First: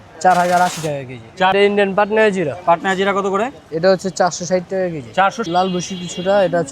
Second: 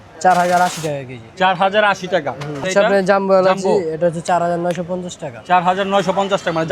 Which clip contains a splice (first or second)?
first